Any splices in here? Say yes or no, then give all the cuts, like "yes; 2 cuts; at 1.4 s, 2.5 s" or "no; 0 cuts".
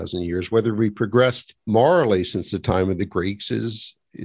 yes; 1 cut; at 1.5 s